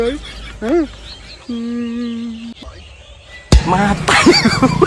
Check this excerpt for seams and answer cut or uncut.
cut